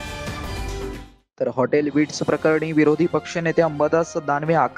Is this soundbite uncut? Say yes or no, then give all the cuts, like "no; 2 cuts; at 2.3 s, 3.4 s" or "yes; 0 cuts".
no; 1 cut; at 1.0 s